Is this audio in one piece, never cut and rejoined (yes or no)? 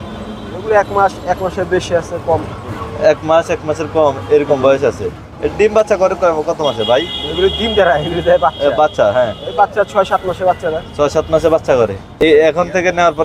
no